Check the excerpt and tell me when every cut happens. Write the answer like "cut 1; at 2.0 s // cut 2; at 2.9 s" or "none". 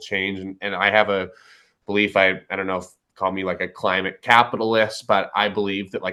none